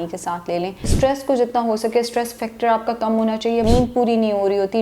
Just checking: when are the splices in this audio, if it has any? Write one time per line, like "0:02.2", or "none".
0:00.9
0:03.6